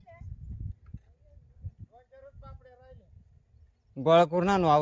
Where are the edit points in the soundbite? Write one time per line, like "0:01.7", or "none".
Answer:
none